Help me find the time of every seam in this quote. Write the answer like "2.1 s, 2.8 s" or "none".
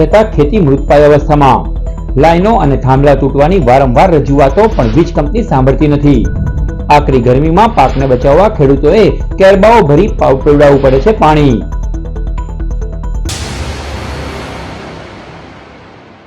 13.2 s